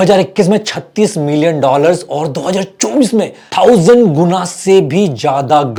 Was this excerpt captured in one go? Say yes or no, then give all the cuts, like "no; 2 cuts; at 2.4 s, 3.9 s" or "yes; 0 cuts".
yes; 0 cuts